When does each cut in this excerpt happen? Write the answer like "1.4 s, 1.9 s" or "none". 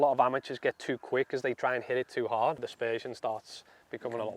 2.7 s